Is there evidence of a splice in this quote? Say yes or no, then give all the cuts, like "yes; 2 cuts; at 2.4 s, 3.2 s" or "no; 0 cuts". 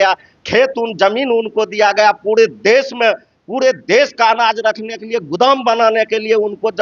no; 0 cuts